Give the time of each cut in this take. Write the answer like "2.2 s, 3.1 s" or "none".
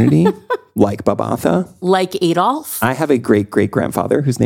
2.7 s